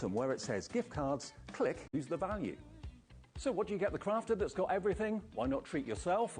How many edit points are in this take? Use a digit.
1